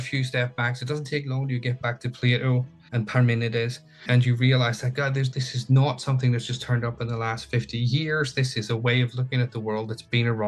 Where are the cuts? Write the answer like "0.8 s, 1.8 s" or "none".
2.8 s, 4.0 s, 5.4 s

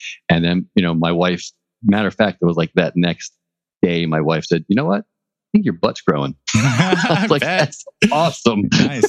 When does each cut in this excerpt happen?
none

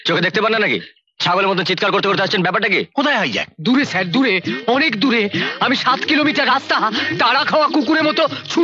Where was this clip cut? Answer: 2.9 s

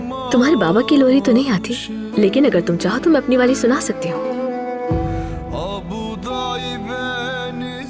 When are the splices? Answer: none

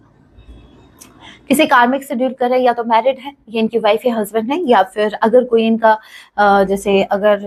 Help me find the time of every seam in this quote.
none

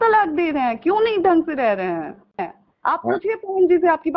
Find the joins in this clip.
2.4 s

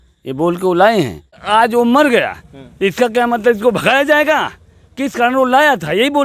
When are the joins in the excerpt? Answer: 1.4 s

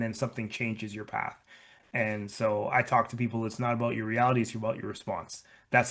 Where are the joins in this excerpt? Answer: none

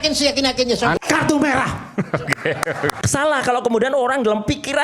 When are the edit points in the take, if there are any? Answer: 1.0 s, 2.9 s

